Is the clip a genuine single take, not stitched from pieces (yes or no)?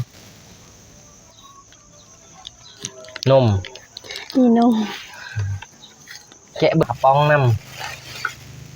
no